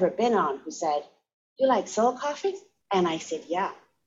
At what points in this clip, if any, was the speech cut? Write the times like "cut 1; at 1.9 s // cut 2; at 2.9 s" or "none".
cut 1; at 2.7 s